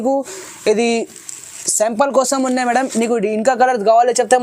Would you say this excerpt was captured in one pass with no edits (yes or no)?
yes